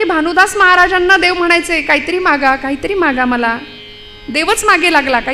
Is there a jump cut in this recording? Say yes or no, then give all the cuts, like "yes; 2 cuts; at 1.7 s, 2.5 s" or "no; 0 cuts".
no; 0 cuts